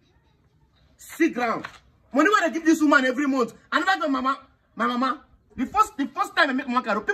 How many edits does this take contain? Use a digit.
1